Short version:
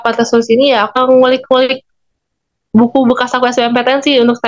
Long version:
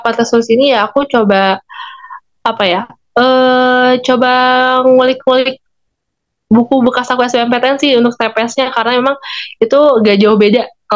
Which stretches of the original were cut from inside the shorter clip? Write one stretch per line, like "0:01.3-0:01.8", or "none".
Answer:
0:00.9-0:04.7

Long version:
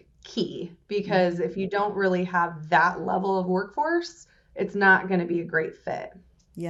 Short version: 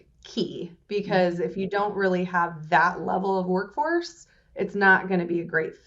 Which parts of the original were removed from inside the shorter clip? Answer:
none

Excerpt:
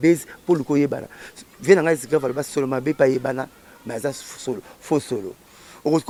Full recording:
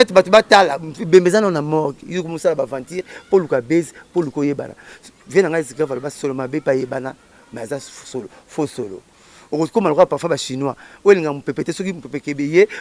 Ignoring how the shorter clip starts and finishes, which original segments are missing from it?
none

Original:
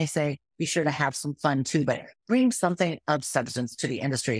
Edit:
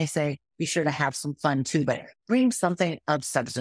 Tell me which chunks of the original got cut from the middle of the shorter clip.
none

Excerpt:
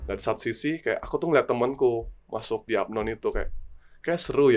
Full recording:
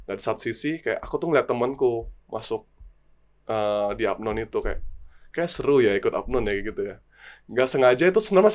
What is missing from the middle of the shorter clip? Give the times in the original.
0:02.7-0:04.0

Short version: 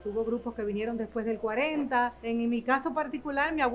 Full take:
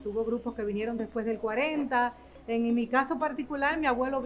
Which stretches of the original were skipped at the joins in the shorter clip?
0:02.2-0:02.4

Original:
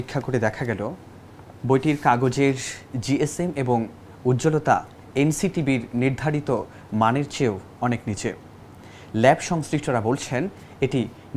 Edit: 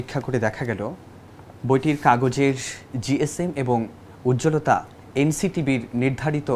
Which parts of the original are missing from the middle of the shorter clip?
none

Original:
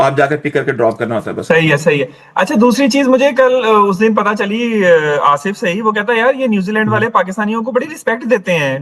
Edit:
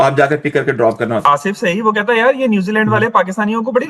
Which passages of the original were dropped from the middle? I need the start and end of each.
0:01.2-0:05.2

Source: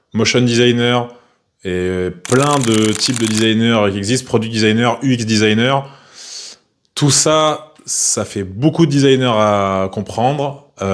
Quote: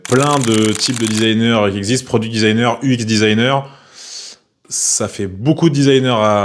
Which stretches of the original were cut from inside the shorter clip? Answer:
0:06.8-0:07.8

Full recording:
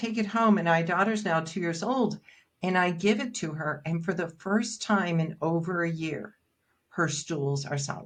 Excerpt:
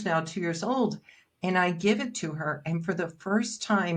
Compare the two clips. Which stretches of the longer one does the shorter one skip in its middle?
none

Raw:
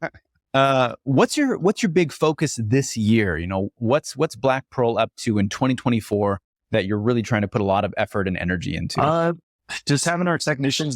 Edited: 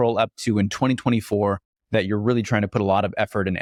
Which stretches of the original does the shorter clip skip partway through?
none

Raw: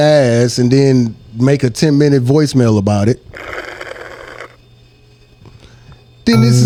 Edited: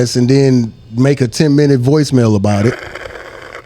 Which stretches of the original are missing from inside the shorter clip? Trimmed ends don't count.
0:03.1-0:03.6

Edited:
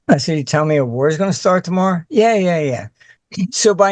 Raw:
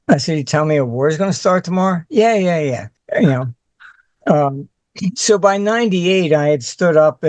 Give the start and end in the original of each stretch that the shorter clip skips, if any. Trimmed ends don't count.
0:03.0-0:04.6

